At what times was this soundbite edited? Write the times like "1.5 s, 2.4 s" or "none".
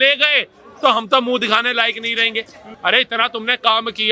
2.6 s